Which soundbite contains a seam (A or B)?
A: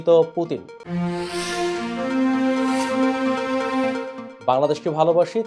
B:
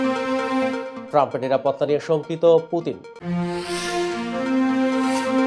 B